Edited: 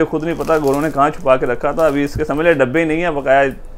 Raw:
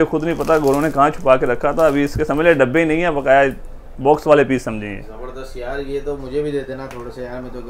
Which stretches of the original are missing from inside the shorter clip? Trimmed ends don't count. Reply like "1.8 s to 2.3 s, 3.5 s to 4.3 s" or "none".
none